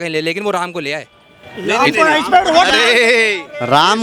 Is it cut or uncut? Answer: uncut